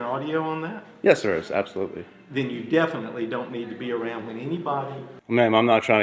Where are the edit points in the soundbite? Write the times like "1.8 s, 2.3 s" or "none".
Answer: 5.1 s